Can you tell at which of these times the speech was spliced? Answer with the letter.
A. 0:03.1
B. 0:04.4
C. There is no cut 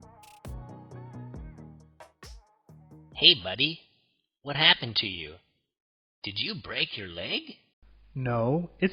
A